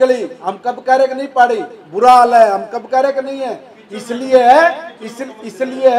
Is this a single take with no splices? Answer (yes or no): yes